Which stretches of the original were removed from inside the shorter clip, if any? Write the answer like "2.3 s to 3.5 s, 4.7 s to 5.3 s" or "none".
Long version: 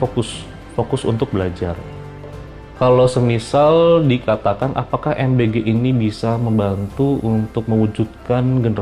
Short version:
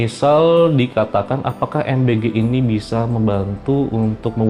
none